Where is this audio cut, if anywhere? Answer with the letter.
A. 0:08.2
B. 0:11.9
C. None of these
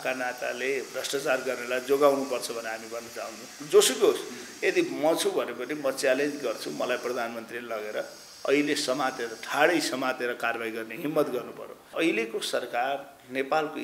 B